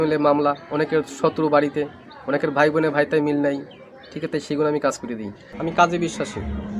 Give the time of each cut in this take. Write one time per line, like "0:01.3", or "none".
0:05.5

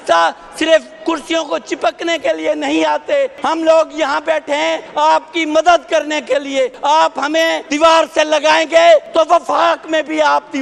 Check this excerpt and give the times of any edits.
0:03.4
0:04.8
0:06.8
0:07.6
0:09.1

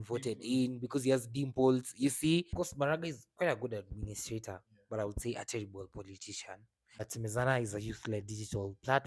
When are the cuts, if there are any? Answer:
0:02.5
0:07.1

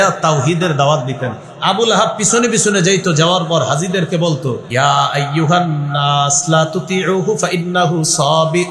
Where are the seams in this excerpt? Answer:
0:04.6

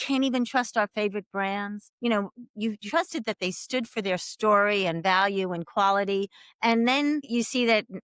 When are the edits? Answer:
0:01.9

